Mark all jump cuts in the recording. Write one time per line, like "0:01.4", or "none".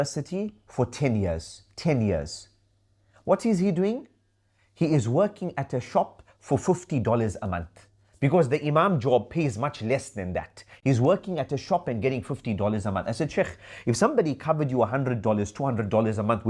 none